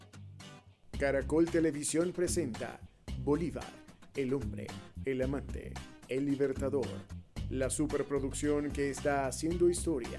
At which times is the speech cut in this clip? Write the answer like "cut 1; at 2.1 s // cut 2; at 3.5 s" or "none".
cut 1; at 1.0 s